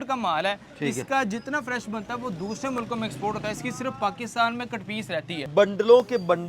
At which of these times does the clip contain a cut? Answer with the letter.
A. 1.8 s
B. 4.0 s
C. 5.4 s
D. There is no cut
C